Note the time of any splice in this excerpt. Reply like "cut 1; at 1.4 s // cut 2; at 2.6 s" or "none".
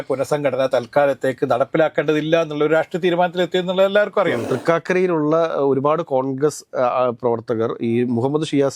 cut 1; at 4.5 s